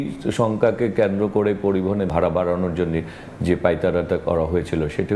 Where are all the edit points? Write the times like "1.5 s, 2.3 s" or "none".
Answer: 2.1 s